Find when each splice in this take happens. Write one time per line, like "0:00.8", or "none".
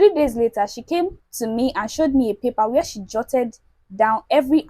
0:01.3